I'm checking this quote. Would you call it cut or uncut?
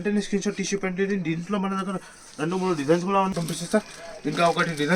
cut